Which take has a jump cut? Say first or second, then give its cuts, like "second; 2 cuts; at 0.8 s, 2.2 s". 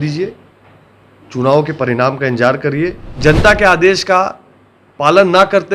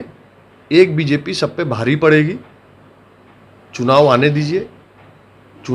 first; 1 cut; at 3.1 s